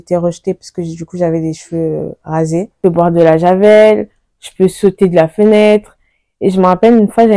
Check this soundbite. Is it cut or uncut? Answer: cut